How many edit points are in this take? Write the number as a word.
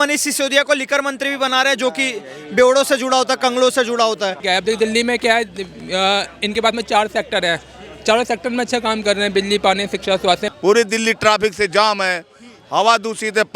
two